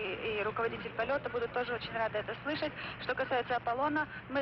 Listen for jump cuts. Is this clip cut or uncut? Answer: cut